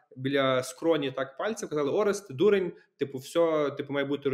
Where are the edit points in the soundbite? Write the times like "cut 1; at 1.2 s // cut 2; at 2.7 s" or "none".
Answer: none